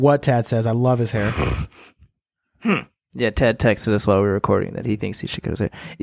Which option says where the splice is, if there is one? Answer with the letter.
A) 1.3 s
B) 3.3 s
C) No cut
A